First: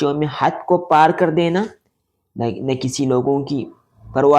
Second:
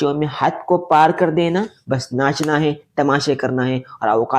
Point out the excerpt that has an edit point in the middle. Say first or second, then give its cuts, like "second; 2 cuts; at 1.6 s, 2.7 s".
second; 1 cut; at 1.8 s